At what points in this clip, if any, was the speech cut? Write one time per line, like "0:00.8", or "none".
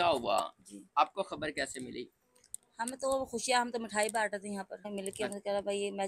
0:04.9

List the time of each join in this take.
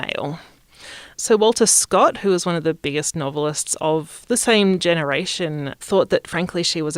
0:01.1
0:05.7

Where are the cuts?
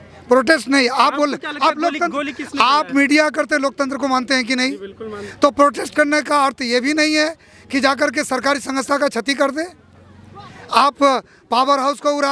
none

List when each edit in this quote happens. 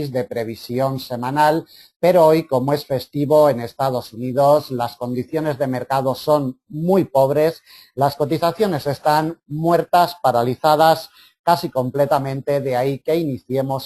none

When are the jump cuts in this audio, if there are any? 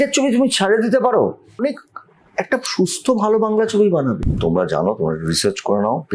0:01.6
0:04.3

